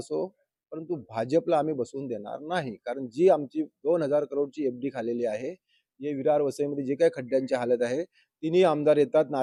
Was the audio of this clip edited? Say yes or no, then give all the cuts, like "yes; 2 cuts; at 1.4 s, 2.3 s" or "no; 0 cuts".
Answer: no; 0 cuts